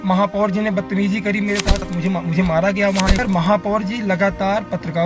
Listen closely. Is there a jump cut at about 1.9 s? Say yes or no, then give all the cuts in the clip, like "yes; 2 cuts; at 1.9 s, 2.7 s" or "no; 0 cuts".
yes; 2 cuts; at 1.9 s, 3.2 s